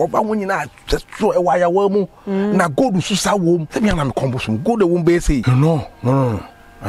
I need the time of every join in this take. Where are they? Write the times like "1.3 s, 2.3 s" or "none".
3.7 s, 5.4 s